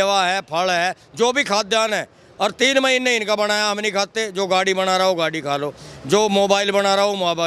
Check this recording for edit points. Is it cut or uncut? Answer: uncut